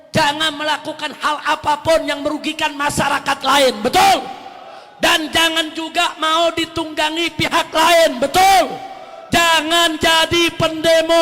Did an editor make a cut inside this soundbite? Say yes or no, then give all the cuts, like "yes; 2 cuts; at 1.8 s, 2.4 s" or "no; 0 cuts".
no; 0 cuts